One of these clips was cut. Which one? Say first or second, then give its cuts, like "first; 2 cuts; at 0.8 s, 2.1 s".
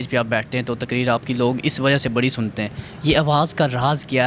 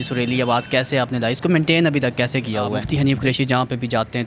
second; 1 cut; at 2.8 s